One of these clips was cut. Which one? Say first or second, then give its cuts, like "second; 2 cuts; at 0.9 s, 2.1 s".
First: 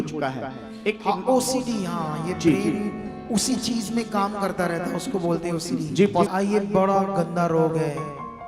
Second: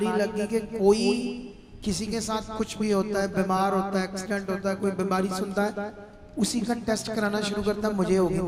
first; 1 cut; at 6.3 s